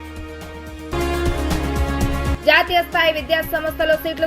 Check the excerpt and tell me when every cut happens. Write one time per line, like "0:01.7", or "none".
0:00.9
0:02.3